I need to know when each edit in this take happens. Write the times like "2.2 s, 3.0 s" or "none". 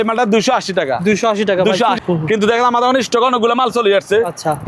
2.1 s